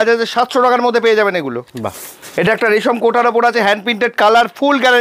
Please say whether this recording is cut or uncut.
uncut